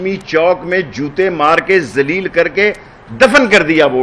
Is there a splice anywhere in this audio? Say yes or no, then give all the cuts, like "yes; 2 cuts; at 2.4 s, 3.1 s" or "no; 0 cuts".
no; 0 cuts